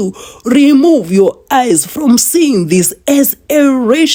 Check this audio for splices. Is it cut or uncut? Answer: uncut